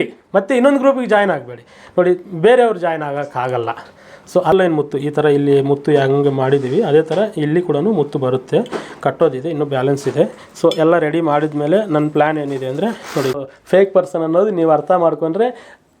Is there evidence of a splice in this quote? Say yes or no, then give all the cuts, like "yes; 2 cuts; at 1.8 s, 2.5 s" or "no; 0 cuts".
yes; 2 cuts; at 4.5 s, 13.4 s